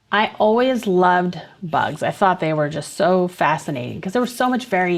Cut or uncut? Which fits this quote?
uncut